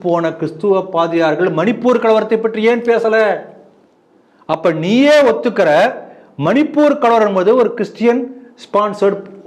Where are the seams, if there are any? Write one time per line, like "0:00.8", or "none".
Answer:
none

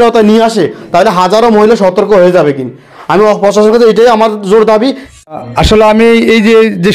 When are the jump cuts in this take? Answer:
0:05.3

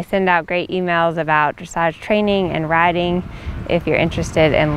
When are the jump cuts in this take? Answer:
none

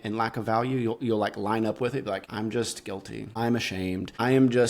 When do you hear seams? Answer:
0:02.2
0:03.3

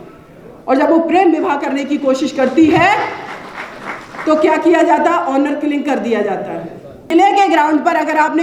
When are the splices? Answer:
0:07.1

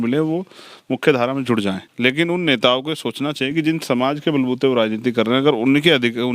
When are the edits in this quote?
0:01.9

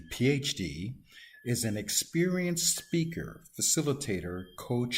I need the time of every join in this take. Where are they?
none

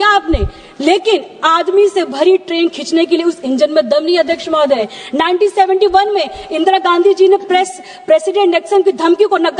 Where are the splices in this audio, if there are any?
0:02.5
0:04.9

